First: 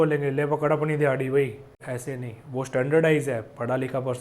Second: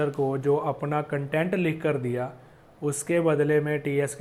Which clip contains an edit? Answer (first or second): first